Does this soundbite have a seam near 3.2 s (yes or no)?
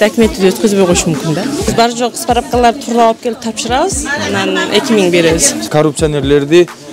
no